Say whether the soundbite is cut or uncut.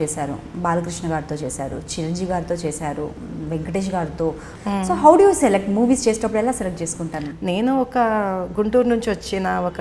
cut